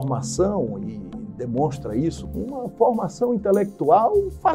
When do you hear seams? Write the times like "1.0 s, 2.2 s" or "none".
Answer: 2.2 s